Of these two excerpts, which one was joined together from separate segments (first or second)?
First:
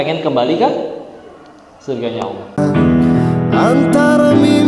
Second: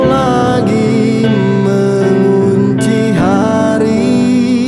first